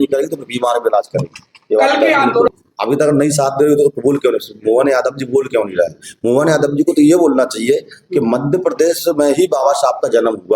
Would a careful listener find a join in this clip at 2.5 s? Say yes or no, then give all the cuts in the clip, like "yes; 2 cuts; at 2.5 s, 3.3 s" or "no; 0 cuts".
yes; 1 cut; at 2.5 s